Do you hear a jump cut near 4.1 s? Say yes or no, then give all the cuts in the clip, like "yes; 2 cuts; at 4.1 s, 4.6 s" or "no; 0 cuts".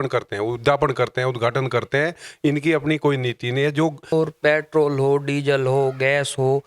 yes; 1 cut; at 4.1 s